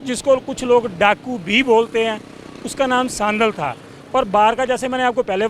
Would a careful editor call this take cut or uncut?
uncut